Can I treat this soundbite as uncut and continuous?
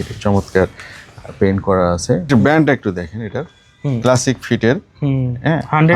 no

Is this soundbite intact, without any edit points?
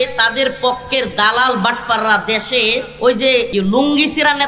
no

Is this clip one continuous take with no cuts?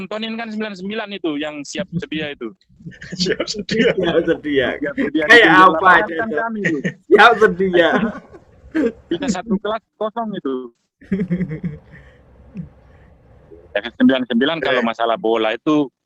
yes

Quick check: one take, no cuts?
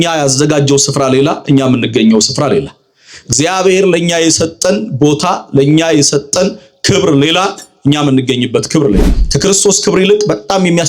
no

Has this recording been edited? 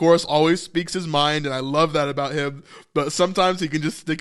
no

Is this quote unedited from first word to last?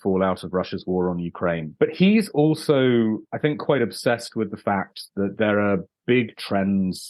no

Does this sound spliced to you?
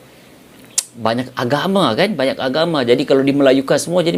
no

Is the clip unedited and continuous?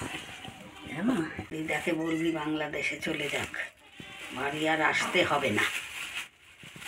no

